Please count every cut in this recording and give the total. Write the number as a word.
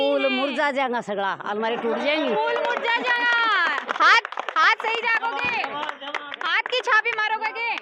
zero